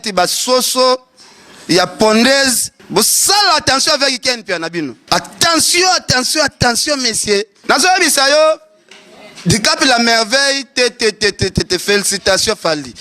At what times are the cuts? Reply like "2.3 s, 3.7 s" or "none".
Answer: 2.7 s, 5.0 s, 7.5 s